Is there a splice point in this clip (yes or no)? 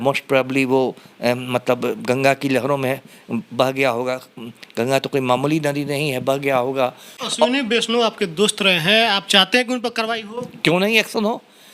yes